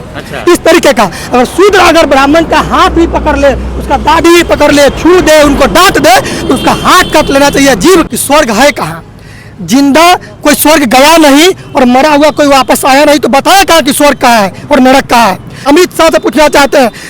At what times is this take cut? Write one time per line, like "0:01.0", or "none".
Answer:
0:08.1
0:15.7